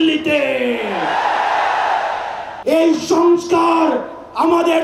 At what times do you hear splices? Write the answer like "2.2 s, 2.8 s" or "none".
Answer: 2.5 s